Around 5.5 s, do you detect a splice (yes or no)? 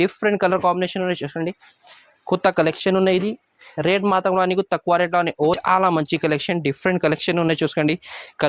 yes